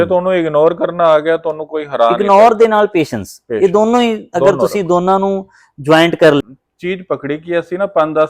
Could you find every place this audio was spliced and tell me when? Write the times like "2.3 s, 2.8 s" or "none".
6.4 s